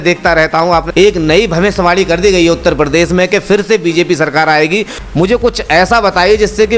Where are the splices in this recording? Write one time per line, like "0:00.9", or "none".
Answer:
0:00.9
0:04.9